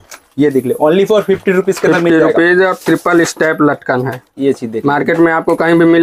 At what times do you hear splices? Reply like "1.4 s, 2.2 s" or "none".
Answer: none